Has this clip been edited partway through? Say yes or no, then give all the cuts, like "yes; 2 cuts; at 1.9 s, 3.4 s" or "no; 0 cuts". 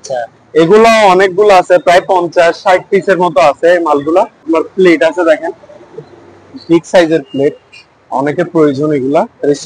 yes; 1 cut; at 4.5 s